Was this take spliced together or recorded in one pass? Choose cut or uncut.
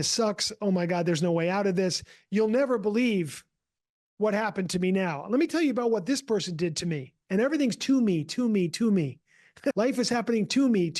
cut